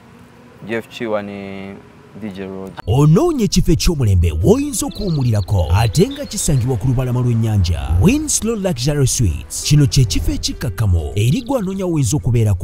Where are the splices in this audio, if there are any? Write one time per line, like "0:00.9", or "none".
0:02.7